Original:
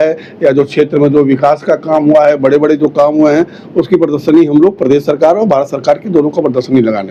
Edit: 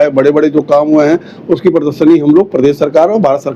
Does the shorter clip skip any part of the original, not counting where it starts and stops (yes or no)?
no